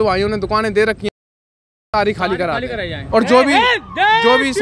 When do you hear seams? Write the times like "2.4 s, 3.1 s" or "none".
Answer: 3.0 s